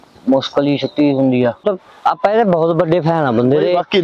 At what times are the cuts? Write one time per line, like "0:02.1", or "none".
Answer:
0:01.6